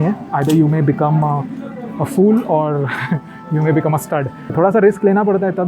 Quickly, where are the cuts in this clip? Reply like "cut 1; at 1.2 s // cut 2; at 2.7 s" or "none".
cut 1; at 4.5 s